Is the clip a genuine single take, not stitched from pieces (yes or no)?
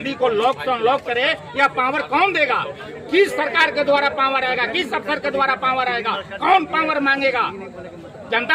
yes